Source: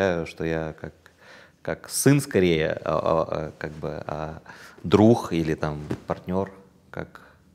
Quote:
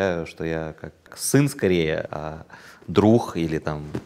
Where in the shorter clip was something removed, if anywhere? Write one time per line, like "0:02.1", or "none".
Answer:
0:01.2
0:02.1